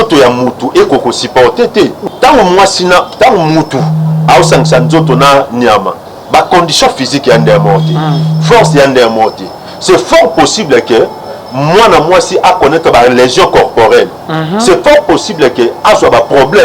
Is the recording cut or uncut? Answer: cut